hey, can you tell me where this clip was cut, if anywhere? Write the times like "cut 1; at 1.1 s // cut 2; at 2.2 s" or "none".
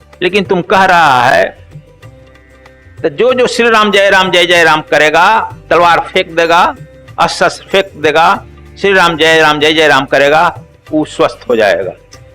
cut 1; at 1.6 s // cut 2; at 3.0 s